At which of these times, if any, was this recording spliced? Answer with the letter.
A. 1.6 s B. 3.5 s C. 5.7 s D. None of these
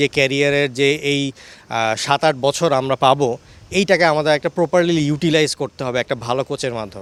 D